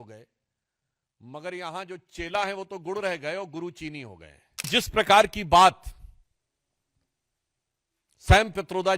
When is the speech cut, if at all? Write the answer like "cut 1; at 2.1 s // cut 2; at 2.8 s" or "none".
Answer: cut 1; at 4.7 s